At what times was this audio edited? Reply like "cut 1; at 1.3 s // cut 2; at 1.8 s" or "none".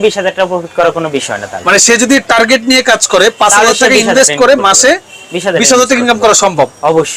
none

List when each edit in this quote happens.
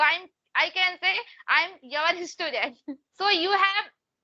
cut 1; at 3.1 s

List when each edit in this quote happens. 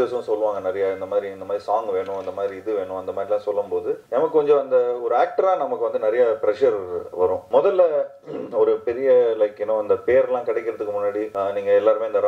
cut 1; at 4.0 s // cut 2; at 7.4 s // cut 3; at 11.3 s

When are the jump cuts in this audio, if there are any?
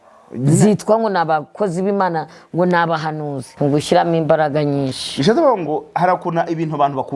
cut 1; at 3.4 s

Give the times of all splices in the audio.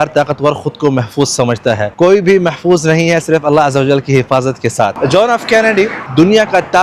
cut 1; at 1.9 s // cut 2; at 4.9 s // cut 3; at 6.0 s

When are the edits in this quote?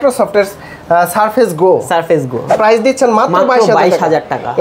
cut 1; at 2.5 s

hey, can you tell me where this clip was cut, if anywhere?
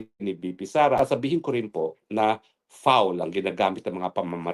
cut 1; at 1.0 s

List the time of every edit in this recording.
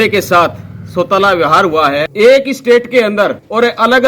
cut 1; at 2.1 s

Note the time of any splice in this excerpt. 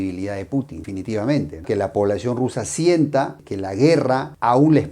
cut 1; at 1.6 s

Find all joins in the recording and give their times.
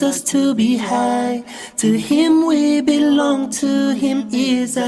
cut 1; at 1.0 s

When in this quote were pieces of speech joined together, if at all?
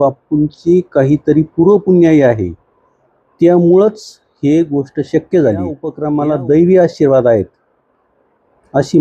cut 1; at 5.9 s

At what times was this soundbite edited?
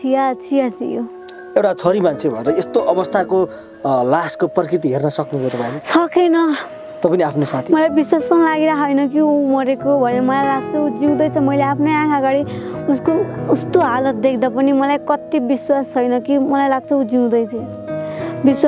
none

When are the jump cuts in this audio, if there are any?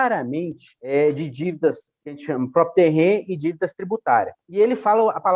cut 1; at 4.4 s

